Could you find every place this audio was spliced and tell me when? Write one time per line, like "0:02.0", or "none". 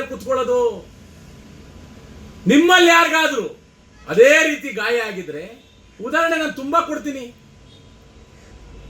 none